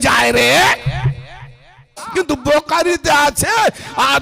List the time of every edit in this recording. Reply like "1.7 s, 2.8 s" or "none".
2.0 s